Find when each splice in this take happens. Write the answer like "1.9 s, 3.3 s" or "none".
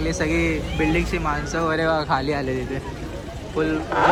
none